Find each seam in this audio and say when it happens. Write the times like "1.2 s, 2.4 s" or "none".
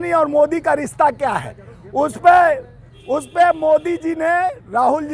none